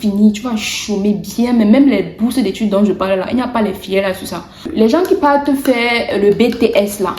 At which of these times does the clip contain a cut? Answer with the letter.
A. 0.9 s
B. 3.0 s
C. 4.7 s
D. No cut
C